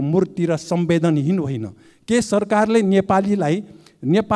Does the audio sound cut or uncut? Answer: uncut